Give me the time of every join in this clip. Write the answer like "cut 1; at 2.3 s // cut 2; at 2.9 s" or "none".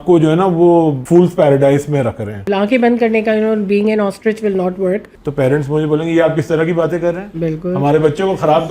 cut 1; at 1.0 s // cut 2; at 2.5 s // cut 3; at 5.0 s